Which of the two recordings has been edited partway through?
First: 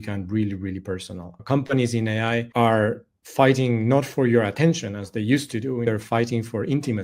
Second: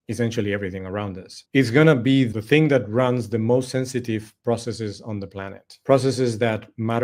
first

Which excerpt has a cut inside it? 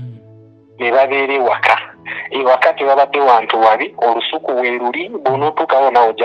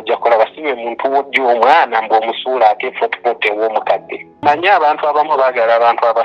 second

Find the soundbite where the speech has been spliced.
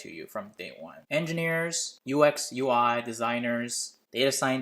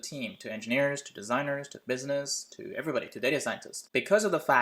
first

